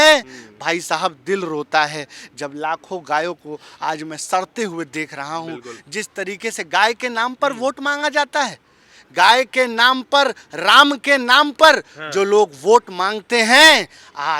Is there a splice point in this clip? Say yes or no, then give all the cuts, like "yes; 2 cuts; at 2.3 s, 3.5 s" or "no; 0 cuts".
no; 0 cuts